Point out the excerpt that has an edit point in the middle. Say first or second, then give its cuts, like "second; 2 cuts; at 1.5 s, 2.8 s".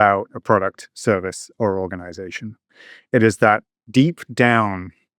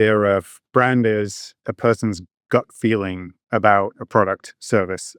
first; 1 cut; at 3.7 s